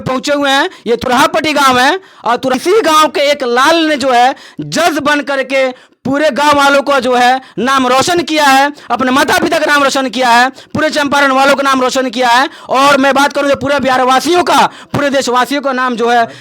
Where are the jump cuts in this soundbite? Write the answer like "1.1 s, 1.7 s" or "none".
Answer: 2.5 s